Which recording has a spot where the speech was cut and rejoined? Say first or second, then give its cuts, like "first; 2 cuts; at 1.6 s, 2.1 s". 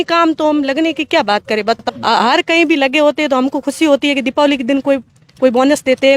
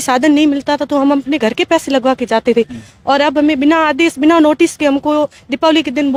first; 1 cut; at 1.9 s